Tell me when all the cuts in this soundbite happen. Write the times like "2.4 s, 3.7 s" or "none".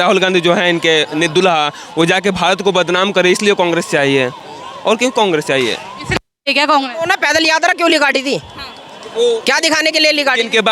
none